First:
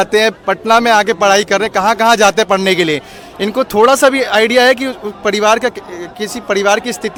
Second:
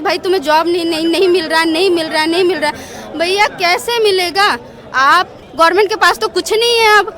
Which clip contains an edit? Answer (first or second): second